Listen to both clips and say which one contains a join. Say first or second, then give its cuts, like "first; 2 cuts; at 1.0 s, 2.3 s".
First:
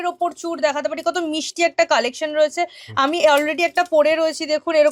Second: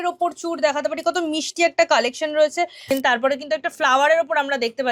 second; 1 cut; at 2.8 s